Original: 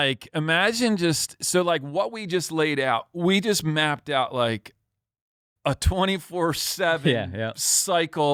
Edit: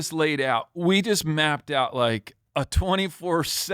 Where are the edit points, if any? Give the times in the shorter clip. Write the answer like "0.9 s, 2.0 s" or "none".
2.3 s

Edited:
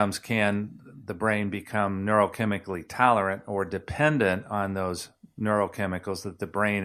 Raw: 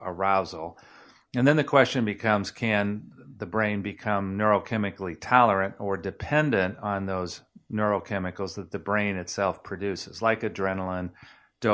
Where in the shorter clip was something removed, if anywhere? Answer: none

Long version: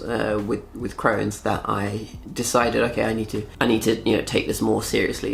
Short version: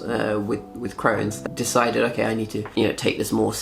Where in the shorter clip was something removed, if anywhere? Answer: 1.4 s, 2.7 s

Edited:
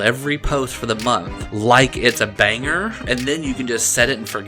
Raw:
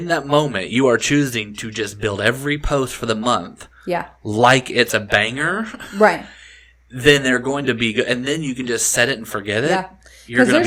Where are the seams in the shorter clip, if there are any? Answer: 1.4 s, 3.1 s

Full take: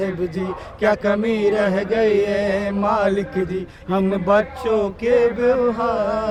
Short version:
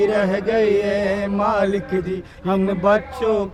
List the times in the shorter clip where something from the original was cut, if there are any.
none

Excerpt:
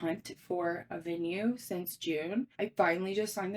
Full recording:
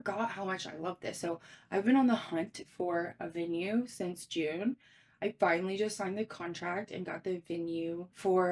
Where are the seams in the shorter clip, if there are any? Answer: 2.5 s

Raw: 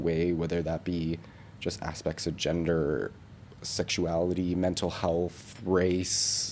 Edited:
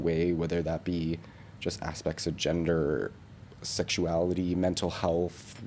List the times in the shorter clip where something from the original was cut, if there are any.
none

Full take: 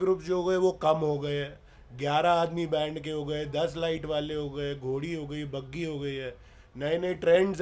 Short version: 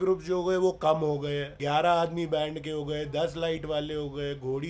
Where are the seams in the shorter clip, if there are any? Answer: 1.5 s

